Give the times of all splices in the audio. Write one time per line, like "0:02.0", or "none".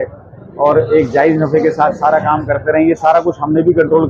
none

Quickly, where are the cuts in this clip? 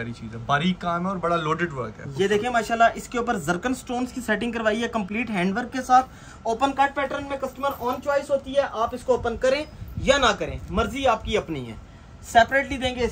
none

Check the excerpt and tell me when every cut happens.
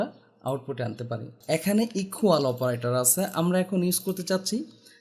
0:01.3

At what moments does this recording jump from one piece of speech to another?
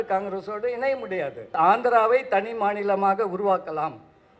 0:01.5

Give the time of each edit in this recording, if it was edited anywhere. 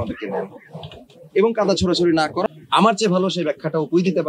0:02.4

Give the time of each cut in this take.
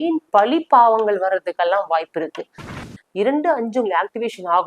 0:02.6

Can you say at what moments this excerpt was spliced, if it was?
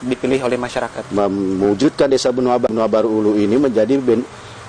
0:01.0

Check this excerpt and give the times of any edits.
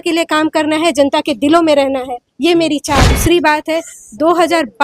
0:03.1

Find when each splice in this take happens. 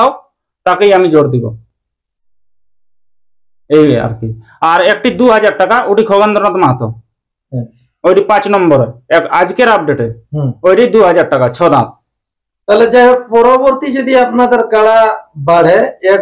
none

